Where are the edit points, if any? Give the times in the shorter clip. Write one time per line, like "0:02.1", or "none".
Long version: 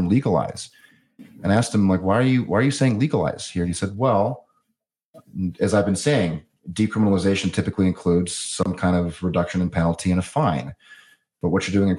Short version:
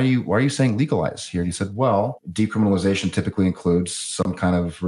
0:02.2